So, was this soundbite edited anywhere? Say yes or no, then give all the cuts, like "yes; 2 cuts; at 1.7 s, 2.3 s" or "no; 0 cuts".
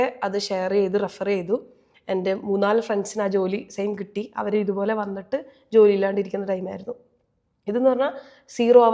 no; 0 cuts